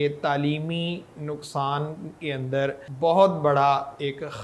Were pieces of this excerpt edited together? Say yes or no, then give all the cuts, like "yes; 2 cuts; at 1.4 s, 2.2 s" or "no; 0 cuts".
yes; 1 cut; at 2.9 s